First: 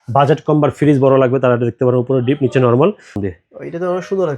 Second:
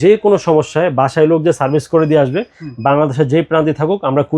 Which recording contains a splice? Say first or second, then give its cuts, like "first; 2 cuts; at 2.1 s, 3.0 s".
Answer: first; 1 cut; at 3.2 s